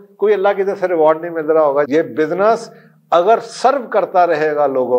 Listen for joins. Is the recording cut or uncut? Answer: cut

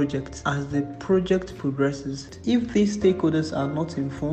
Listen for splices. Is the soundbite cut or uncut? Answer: cut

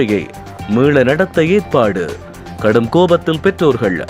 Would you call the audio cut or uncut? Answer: uncut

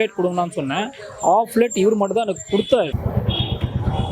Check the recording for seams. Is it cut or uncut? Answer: cut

